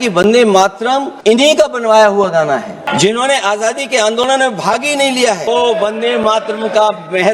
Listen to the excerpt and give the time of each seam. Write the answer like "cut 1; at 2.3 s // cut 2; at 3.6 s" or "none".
cut 1; at 1.1 s // cut 2; at 2.8 s // cut 3; at 5.5 s